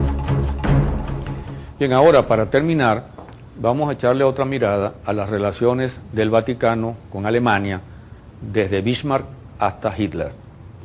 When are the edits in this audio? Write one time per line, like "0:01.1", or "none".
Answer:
0:09.9